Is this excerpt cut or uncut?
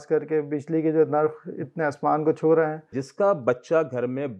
cut